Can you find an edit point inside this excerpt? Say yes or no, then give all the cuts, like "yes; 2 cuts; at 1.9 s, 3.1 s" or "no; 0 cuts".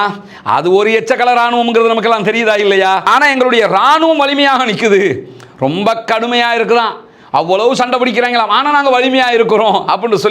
yes; 1 cut; at 3.1 s